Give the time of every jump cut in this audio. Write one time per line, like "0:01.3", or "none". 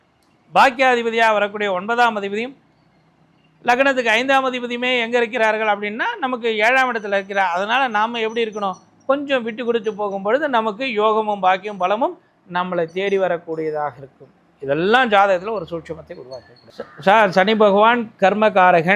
0:16.6